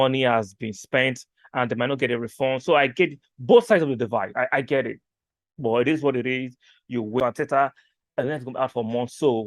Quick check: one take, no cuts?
no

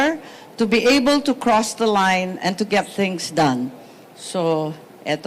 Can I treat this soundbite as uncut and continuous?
yes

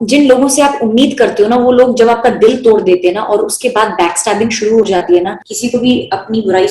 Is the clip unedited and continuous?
no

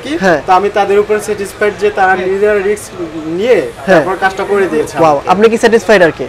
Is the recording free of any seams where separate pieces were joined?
yes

